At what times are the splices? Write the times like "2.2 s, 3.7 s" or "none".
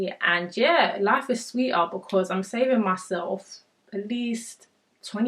none